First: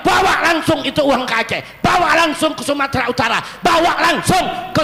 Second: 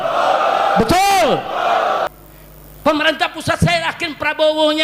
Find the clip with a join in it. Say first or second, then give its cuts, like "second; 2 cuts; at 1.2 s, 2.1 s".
second; 1 cut; at 2.1 s